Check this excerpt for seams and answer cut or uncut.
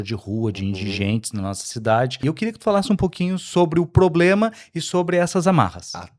cut